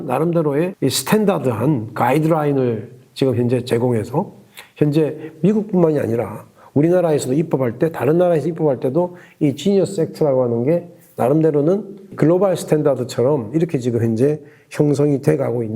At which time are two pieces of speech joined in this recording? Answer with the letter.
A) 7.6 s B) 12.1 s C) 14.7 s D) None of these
B